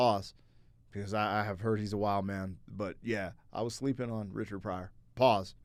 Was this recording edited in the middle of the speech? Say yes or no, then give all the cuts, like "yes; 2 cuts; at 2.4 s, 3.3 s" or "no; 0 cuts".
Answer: no; 0 cuts